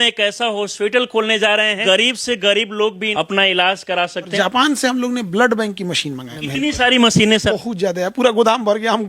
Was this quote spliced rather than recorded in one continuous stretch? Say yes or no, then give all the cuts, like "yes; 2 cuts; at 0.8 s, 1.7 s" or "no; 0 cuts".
yes; 5 cuts; at 1.8 s, 3.0 s, 4.3 s, 6.3 s, 7.5 s